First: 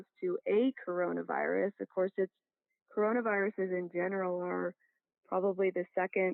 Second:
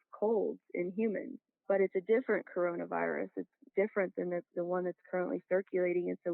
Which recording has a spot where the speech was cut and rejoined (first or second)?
second